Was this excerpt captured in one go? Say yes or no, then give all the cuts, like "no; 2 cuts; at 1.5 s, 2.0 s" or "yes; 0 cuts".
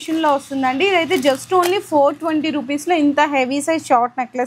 yes; 0 cuts